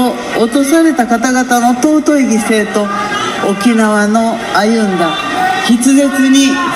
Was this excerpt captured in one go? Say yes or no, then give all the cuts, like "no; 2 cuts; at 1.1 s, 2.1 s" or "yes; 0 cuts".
yes; 0 cuts